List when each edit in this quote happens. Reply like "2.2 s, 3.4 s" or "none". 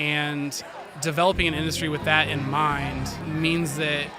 3.2 s